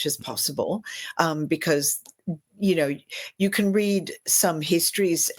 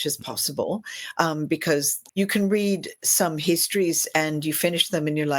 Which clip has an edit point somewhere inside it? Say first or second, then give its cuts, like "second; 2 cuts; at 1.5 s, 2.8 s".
second; 1 cut; at 2.0 s